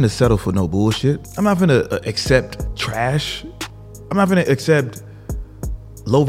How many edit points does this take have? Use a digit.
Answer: 2